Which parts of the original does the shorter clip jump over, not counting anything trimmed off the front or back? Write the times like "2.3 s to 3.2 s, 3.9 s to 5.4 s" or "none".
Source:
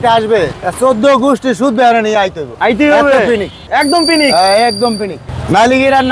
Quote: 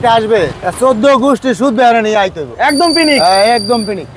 2.5 s to 3.6 s